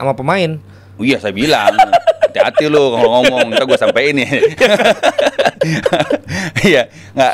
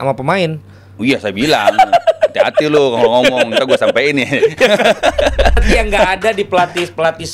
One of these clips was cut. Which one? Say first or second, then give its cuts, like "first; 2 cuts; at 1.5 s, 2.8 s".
second; 1 cut; at 5.6 s